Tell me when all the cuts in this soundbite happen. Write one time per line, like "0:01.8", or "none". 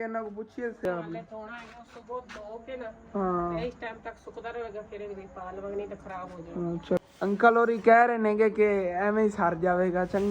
0:00.8
0:07.0